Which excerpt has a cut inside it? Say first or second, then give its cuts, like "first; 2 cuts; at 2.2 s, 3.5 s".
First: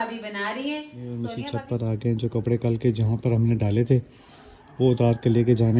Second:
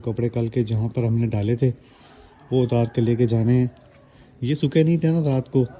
first; 1 cut; at 1.3 s